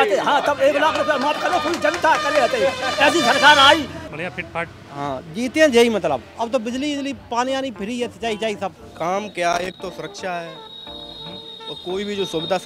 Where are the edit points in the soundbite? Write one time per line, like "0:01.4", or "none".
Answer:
0:04.0
0:08.8